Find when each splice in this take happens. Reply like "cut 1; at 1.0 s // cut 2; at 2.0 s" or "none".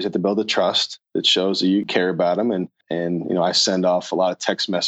cut 1; at 1.9 s // cut 2; at 2.8 s

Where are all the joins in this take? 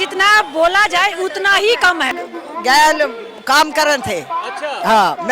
cut 1; at 2.2 s

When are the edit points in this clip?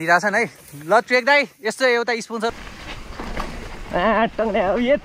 cut 1; at 2.5 s

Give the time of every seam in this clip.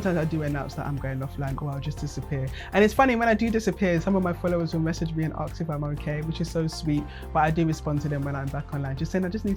none

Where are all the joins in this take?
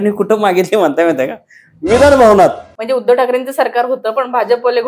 cut 1; at 2.7 s

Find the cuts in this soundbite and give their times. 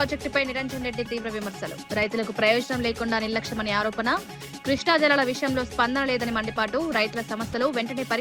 none

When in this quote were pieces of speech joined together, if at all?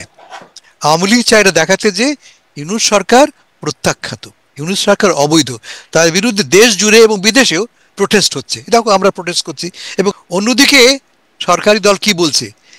cut 1; at 10.1 s

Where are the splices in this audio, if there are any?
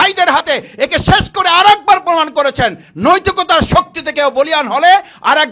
none

